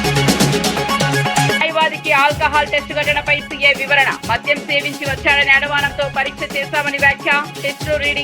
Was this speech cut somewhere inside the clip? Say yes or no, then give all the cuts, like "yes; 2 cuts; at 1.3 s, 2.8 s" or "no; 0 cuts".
no; 0 cuts